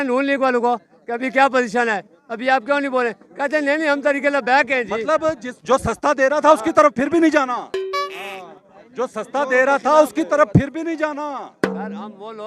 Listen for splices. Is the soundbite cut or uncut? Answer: uncut